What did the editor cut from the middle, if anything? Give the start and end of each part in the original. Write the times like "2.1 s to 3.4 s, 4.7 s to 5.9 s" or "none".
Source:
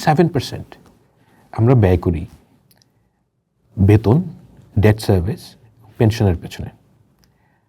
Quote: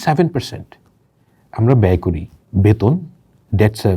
2.3 s to 3.6 s